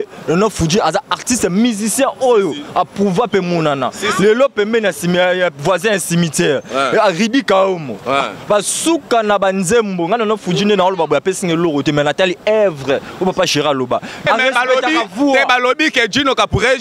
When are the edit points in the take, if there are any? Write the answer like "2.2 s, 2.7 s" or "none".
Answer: 14.2 s